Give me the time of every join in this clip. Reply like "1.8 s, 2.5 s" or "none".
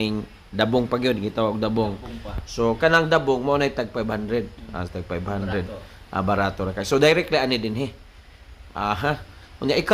none